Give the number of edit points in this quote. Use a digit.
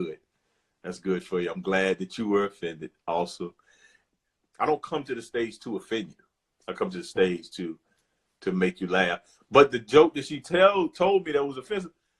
1